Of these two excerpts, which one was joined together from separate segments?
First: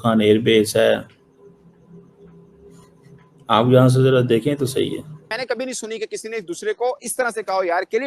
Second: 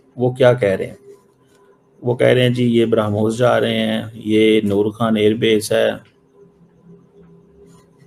first; 1 cut; at 5.3 s

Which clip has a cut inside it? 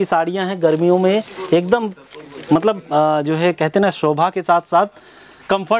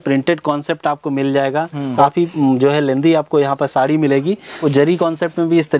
second; 2 cuts; at 2.0 s, 4.6 s

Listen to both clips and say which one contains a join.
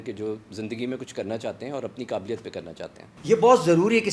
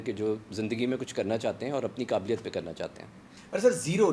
first; 1 cut; at 3.1 s

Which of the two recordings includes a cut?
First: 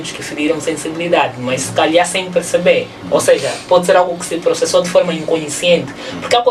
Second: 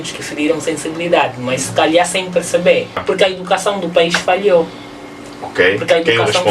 second; 1 cut; at 3.0 s

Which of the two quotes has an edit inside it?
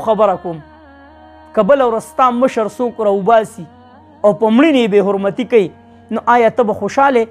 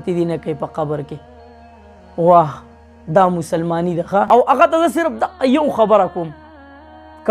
second; 1 cut; at 4.3 s

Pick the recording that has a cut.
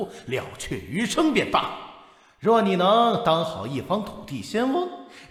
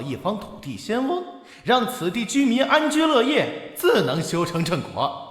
second; 1 cut; at 3.8 s

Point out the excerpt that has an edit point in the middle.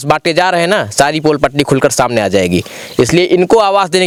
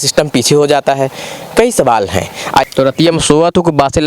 second; 1 cut; at 2.7 s

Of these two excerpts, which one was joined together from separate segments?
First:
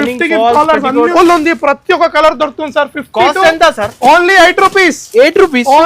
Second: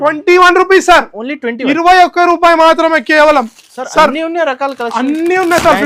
first; 1 cut; at 1.1 s

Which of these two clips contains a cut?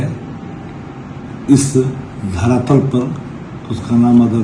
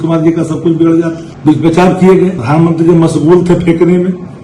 second; 2 cuts; at 1.3 s, 2.4 s

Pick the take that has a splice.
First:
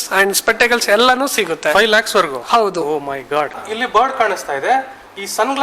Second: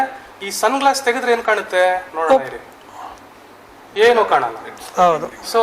first; 1 cut; at 3.6 s

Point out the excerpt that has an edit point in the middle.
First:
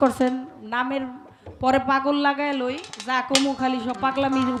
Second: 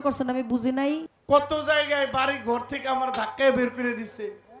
second; 1 cut; at 1.1 s

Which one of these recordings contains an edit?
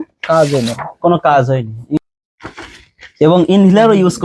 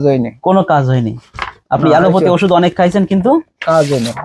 first; 1 cut; at 2.0 s

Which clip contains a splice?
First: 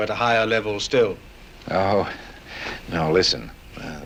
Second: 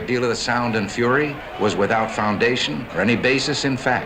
second; 2 cuts; at 1.4 s, 2.8 s

